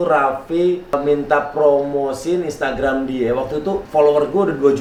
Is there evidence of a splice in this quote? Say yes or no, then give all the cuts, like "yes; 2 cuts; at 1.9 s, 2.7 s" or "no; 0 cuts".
no; 0 cuts